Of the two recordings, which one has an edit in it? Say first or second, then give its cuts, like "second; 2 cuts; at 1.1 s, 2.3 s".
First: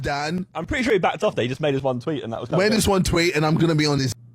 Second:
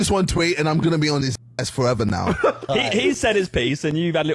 second; 1 cut; at 2.6 s